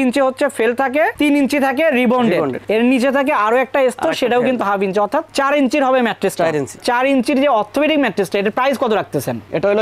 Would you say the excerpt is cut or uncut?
cut